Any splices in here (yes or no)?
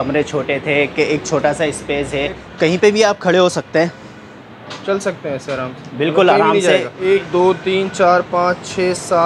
yes